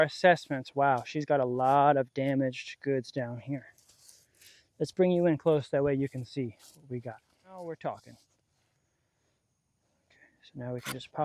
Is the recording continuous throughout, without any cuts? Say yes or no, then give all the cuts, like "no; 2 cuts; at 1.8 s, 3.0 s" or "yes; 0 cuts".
no; 1 cut; at 7.6 s